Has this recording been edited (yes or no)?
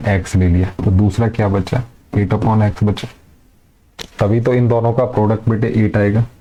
no